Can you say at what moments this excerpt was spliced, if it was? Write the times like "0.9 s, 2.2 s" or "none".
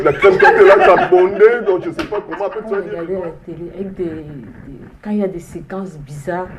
2.9 s